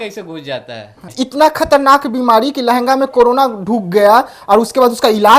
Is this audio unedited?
no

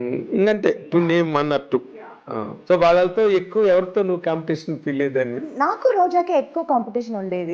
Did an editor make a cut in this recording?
yes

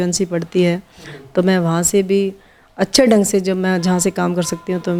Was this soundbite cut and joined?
no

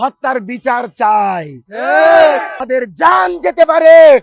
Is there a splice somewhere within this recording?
yes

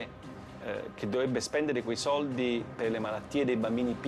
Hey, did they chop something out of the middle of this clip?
no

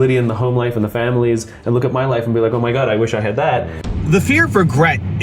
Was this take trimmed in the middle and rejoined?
yes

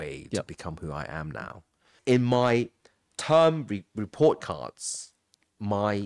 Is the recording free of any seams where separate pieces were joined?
no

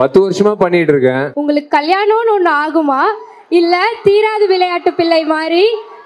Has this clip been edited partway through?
yes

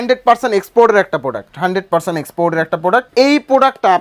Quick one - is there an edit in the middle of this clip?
no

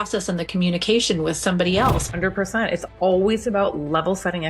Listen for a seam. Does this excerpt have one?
yes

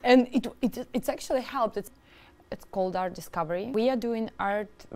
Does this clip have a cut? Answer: yes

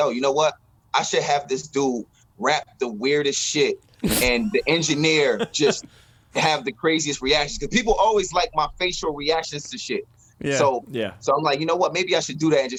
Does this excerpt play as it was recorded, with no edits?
yes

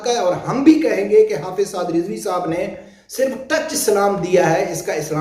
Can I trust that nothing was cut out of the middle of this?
yes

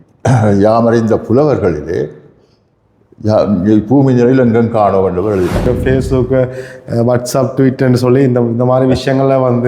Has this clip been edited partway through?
yes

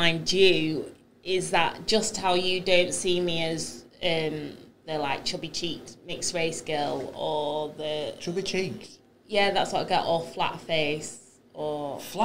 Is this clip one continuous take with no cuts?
yes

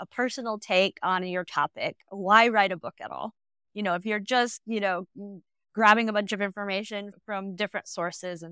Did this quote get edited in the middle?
yes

